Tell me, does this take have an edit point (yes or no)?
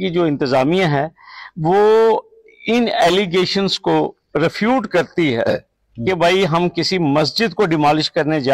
no